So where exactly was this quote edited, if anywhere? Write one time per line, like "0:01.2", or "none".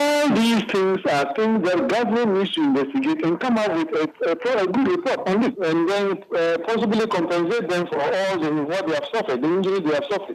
0:05.6
0:07.9